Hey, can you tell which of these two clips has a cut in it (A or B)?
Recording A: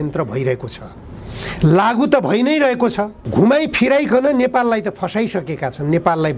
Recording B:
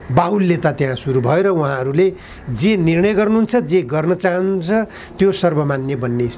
A